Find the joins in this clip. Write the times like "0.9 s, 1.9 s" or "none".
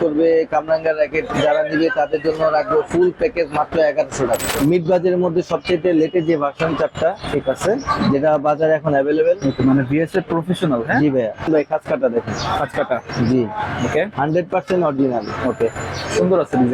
4.5 s, 11.5 s

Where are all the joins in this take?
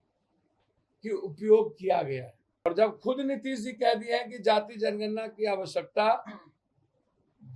2.7 s

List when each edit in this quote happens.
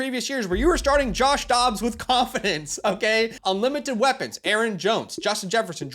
3.4 s

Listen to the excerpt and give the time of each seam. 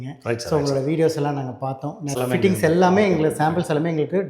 2.2 s

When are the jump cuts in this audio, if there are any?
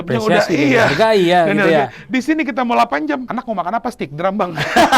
3.3 s

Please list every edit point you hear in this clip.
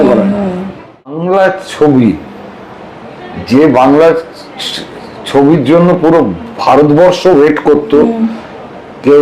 1.2 s

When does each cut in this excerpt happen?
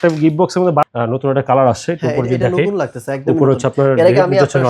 0.9 s

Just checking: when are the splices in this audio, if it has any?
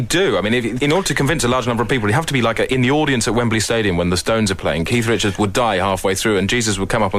none

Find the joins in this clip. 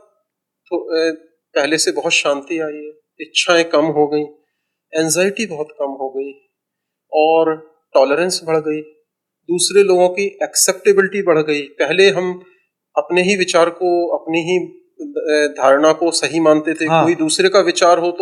none

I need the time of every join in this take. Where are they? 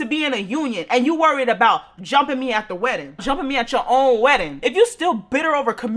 3.2 s, 4.6 s

